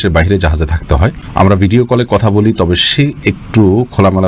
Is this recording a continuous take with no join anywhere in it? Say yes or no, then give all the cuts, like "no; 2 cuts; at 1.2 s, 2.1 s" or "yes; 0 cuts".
no; 1 cut; at 1.2 s